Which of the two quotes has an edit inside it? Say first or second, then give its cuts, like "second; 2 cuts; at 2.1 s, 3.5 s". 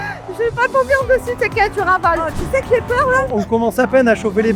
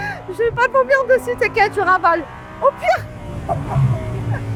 first; 2 cuts; at 2.3 s, 3.3 s